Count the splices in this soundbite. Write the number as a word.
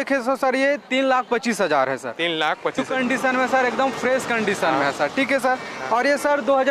one